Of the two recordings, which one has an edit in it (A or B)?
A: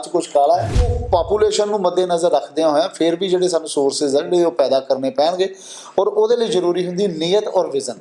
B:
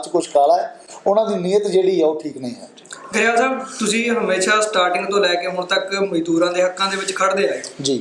A